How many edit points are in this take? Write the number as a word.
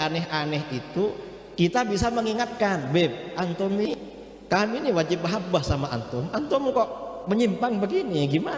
one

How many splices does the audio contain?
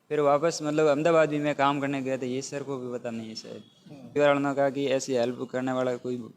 one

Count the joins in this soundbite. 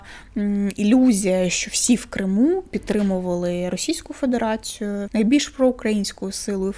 one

